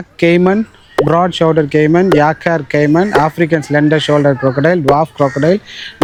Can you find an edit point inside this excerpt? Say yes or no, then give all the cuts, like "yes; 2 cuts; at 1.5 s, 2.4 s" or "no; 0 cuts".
no; 0 cuts